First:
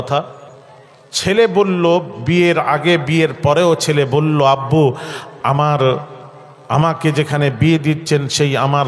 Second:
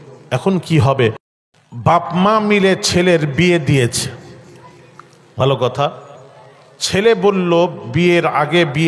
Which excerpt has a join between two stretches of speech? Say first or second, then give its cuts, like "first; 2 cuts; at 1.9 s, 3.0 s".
second; 1 cut; at 1.2 s